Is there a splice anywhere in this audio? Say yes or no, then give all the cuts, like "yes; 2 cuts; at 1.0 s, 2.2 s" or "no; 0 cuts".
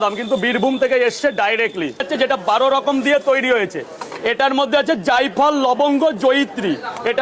yes; 1 cut; at 2.1 s